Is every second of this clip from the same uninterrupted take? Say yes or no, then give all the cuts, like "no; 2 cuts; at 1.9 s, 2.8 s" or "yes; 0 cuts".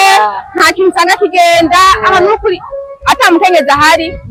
yes; 0 cuts